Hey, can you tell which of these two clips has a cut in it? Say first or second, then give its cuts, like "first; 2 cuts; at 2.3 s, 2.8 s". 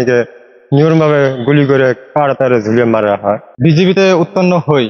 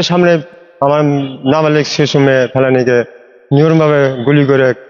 first; 1 cut; at 3.5 s